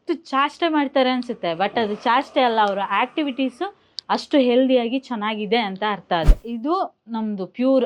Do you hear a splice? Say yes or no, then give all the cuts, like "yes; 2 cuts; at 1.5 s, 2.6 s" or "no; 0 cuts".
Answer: yes; 1 cut; at 6.4 s